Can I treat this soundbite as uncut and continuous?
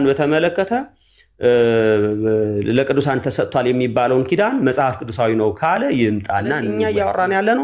no; 1 cut; at 6.7 s

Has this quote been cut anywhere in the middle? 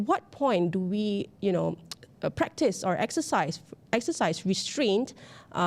no; 0 cuts

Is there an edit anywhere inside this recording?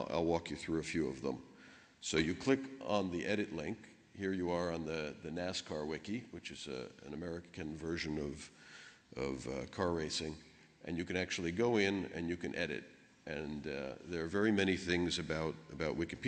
no; 0 cuts

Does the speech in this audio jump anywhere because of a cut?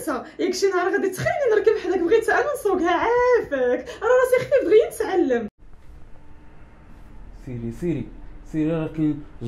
no; 0 cuts

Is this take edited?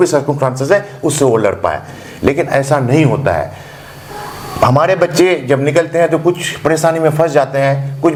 no; 0 cuts

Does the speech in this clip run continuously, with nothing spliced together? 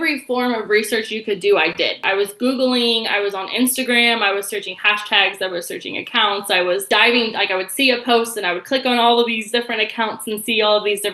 no; 2 cuts; at 2.0 s, 6.8 s

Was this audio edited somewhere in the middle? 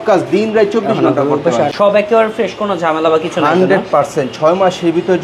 yes; 1 cut; at 1.7 s

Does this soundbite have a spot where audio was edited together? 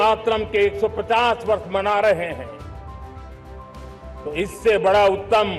no; 0 cuts

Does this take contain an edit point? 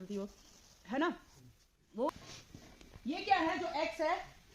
yes; 1 cut; at 2.1 s

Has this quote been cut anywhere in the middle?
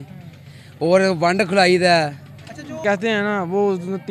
yes; 1 cut; at 2.8 s

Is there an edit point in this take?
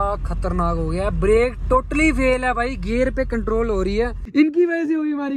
yes; 1 cut; at 4.2 s

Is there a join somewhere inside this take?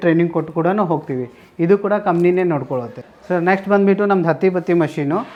no; 0 cuts

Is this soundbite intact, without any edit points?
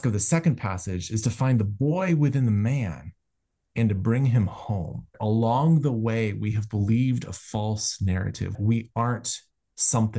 no; 2 cuts; at 5.2 s, 8.5 s

